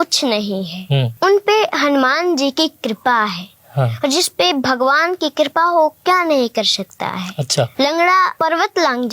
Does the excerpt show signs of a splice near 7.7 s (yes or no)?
yes